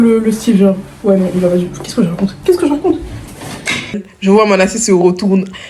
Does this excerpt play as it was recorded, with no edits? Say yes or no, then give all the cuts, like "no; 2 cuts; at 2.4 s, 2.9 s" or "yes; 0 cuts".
no; 1 cut; at 4.1 s